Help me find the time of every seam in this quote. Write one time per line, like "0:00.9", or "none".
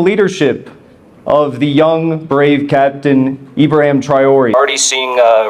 0:04.5